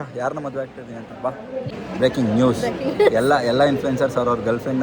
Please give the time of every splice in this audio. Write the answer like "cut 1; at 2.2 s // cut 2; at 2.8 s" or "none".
cut 1; at 1.8 s